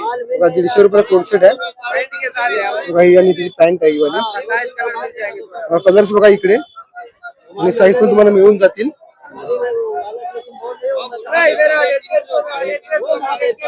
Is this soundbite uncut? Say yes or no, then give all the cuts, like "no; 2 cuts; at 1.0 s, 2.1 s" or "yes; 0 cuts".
yes; 0 cuts